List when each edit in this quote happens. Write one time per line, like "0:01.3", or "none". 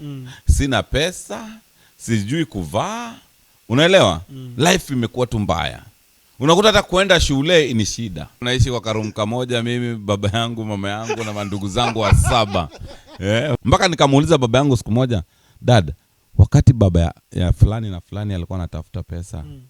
0:08.4
0:13.6